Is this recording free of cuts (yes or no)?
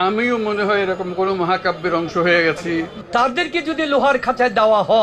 no